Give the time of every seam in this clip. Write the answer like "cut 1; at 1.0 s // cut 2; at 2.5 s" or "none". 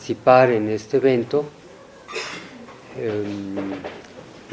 cut 1; at 2.0 s